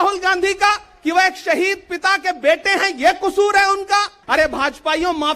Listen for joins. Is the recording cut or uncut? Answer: cut